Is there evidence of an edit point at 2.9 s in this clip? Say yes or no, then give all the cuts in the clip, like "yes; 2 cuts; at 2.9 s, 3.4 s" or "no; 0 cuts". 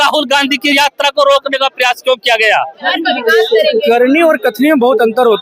yes; 1 cut; at 2.9 s